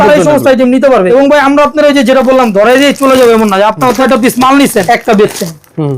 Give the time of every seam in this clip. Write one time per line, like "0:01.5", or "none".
0:01.1
0:04.0
0:04.8